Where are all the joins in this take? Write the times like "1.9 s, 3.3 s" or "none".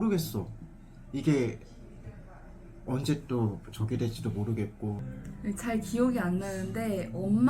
5.1 s